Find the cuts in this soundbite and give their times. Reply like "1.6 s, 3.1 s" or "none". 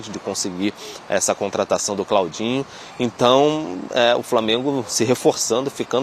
none